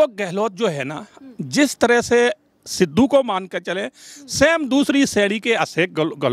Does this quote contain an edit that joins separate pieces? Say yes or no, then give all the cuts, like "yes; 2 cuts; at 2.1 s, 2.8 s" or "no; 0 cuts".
no; 0 cuts